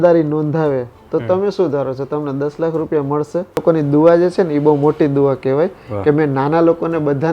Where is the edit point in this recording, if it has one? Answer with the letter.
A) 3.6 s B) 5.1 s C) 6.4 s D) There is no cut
A